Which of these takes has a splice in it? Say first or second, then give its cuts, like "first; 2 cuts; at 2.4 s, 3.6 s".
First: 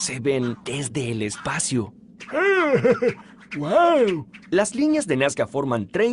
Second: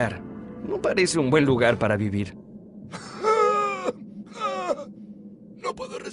second; 1 cut; at 2.1 s